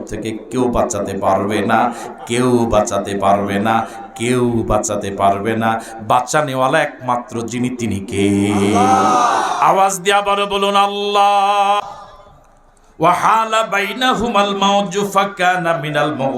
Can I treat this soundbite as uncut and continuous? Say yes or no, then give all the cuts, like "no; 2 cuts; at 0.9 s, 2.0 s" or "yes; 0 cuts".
no; 1 cut; at 11.8 s